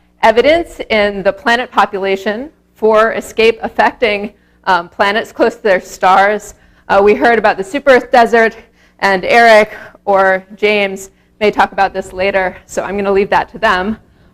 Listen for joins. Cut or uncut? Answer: cut